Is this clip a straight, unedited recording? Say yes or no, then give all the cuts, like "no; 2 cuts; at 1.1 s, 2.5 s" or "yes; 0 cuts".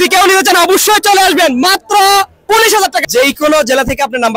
no; 1 cut; at 3.0 s